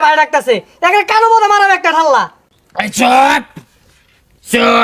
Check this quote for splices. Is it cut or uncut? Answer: uncut